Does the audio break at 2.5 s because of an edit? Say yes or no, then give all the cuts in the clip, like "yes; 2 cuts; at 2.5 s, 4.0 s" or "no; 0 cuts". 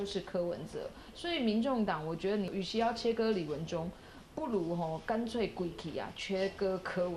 yes; 1 cut; at 2.5 s